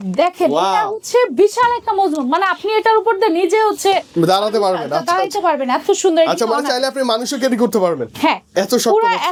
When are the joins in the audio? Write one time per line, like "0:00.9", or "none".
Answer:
none